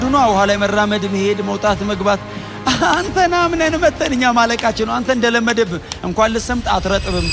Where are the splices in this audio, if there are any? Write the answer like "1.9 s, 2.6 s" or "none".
none

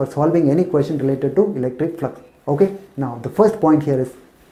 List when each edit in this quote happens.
none

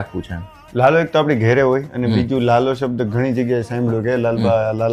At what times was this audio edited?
none

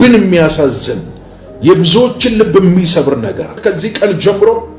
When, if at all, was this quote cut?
3.6 s

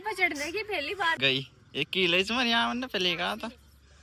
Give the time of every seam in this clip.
1.2 s

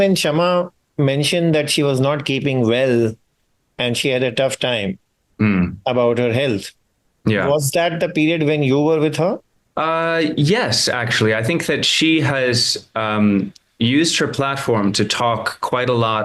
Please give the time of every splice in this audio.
none

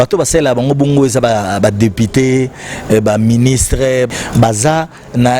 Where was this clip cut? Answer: 4.1 s

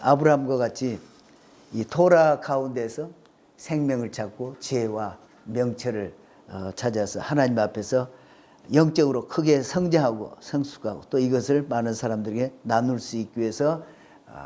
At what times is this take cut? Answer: none

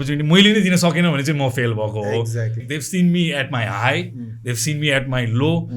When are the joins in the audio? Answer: 2.6 s

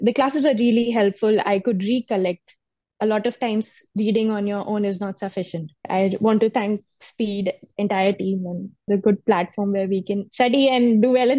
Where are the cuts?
5.9 s, 8.9 s, 10.3 s

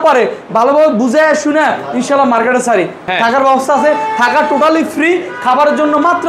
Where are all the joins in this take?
3.1 s

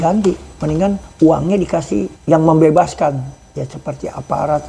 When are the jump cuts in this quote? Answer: 1.0 s, 2.1 s

